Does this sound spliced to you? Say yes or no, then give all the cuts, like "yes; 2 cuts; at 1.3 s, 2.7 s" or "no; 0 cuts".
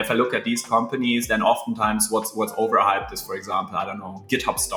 no; 0 cuts